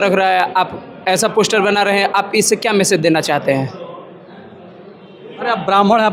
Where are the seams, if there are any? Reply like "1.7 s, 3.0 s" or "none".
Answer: none

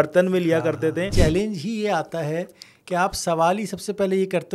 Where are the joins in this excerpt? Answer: 1.1 s

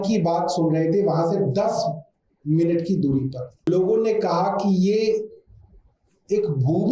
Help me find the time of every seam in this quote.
3.7 s

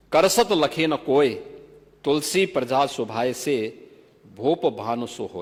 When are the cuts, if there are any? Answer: none

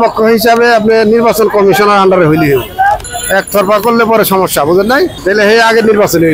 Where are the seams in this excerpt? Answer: 3.1 s, 5.2 s

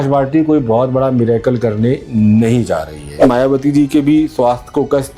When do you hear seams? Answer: 3.2 s

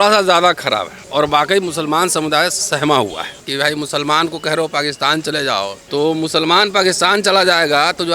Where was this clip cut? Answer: 1.0 s, 3.4 s, 5.8 s

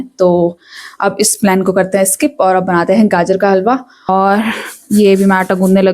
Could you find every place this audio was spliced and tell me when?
4.1 s

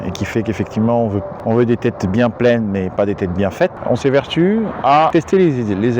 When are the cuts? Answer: 1.3 s, 3.8 s, 5.1 s

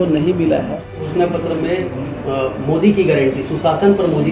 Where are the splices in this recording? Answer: 1.1 s

